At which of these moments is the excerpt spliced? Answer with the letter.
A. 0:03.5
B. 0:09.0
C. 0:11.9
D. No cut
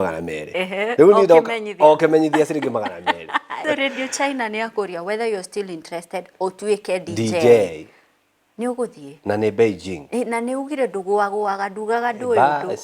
A